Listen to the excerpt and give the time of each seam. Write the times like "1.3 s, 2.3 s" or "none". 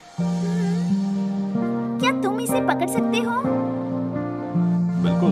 1.5 s, 4.4 s